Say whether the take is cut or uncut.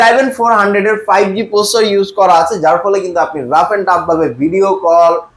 uncut